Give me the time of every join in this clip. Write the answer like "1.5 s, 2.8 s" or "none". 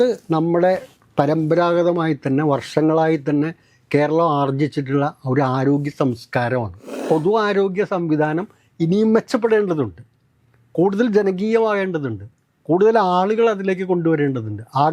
7.0 s